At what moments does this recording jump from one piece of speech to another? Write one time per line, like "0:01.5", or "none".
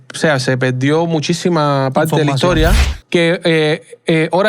0:02.8